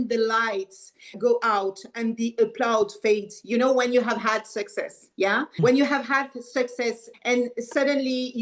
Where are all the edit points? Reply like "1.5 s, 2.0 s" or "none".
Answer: 1.1 s, 5.6 s, 7.1 s